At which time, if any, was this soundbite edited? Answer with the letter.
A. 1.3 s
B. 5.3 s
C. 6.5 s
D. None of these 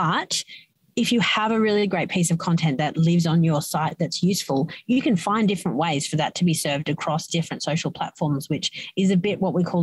D